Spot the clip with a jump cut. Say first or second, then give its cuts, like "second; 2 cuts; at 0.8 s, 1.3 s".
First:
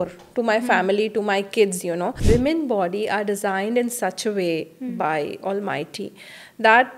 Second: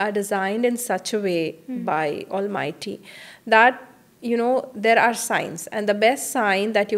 first; 1 cut; at 2.2 s